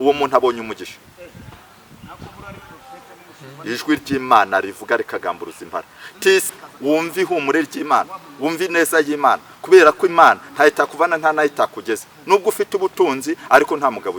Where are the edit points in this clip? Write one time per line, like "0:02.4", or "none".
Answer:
0:06.5